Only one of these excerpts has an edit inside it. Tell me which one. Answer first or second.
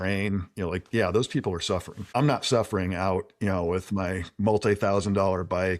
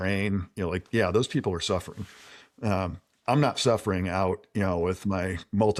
first